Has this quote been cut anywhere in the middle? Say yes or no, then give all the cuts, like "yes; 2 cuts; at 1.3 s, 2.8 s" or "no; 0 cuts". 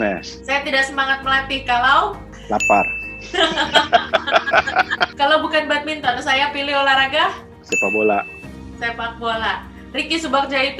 no; 0 cuts